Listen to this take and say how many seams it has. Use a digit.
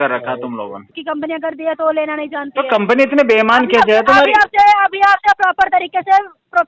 1